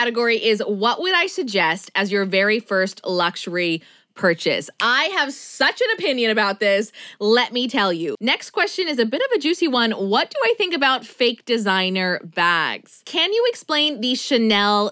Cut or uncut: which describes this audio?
cut